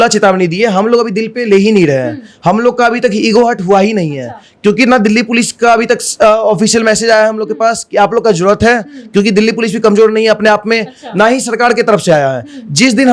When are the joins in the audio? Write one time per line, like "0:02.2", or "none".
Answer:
none

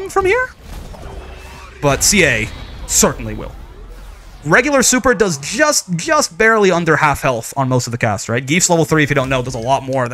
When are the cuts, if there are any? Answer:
none

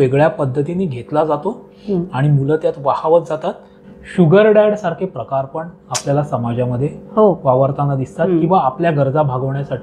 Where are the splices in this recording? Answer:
0:03.8

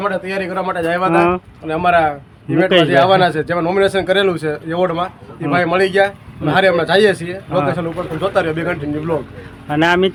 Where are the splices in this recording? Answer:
none

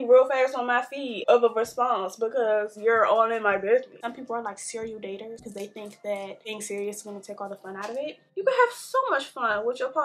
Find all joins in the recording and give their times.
0:01.2
0:04.0
0:05.4
0:06.5
0:08.2

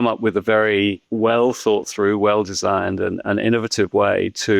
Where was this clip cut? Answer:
0:01.0

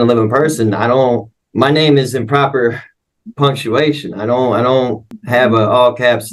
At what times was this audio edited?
0:01.4
0:05.2

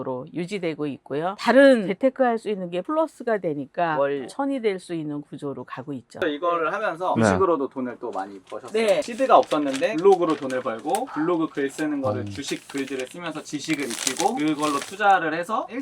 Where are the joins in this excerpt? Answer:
0:06.2
0:09.0

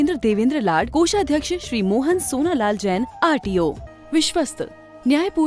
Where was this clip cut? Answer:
0:03.9

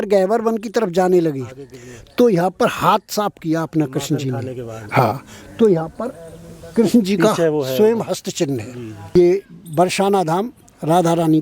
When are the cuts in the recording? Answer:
0:09.2

